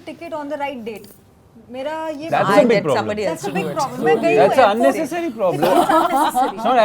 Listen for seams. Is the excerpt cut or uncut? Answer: uncut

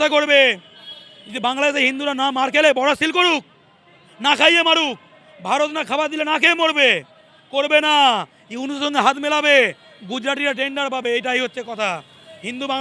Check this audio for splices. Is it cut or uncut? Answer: uncut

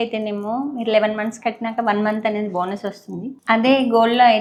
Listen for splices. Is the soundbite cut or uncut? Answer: uncut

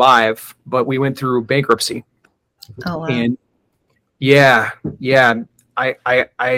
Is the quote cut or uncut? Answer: uncut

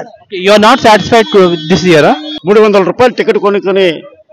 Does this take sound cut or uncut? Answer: cut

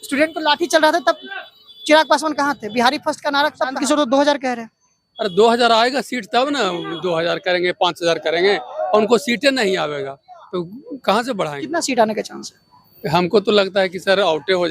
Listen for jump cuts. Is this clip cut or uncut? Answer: cut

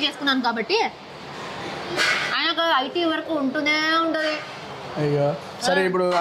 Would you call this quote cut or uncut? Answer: uncut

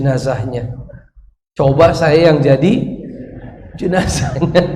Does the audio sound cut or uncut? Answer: uncut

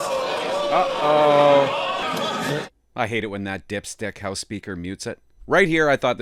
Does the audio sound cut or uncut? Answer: cut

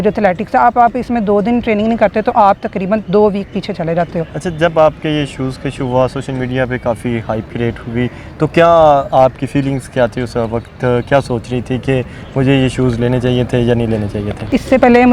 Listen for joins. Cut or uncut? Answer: uncut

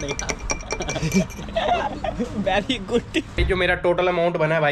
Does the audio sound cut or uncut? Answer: cut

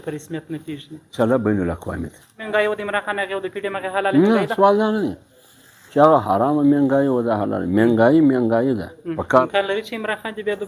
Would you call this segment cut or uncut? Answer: cut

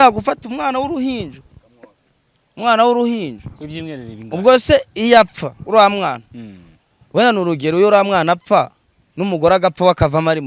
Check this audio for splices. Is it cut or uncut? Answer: uncut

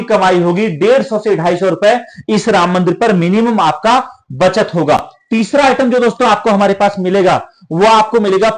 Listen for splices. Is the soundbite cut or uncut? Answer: uncut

